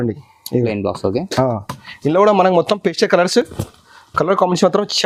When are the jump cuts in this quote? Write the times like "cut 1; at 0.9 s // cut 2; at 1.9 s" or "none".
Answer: none